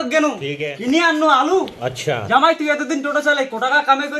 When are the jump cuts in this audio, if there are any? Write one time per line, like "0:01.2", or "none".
none